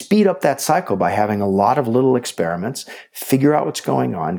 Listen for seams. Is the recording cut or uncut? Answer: uncut